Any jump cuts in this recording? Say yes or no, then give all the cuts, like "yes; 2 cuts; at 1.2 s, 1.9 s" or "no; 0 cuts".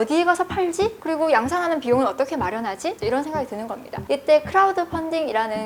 no; 0 cuts